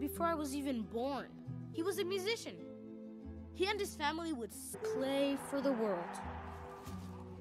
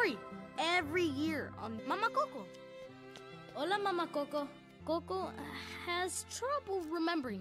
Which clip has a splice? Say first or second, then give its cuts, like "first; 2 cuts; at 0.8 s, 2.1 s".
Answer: second; 1 cut; at 4.7 s